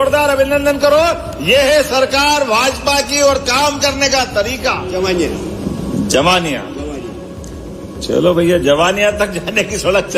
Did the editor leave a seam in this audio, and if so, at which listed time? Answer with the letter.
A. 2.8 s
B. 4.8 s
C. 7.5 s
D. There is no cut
B